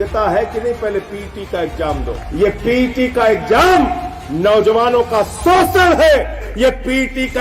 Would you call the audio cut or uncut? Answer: cut